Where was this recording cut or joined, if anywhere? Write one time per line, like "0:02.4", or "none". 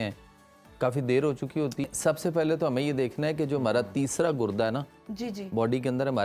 0:01.9